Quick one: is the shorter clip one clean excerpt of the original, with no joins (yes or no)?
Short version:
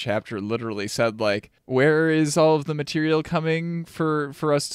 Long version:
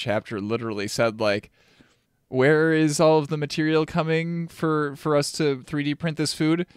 no